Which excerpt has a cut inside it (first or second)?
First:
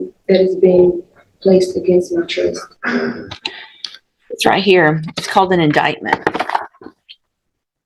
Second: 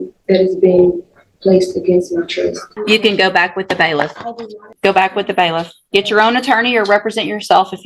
second